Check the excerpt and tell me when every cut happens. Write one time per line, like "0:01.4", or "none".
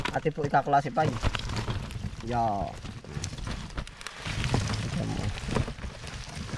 none